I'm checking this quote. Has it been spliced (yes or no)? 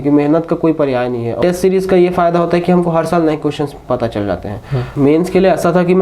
yes